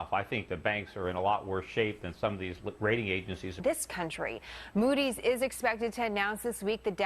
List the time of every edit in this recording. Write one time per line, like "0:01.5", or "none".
none